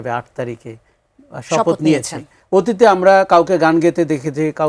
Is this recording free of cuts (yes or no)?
no